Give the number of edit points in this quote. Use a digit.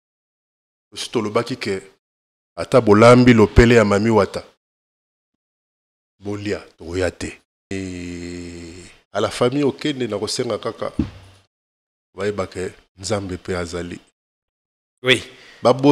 1